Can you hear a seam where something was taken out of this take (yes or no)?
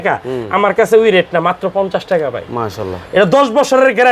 no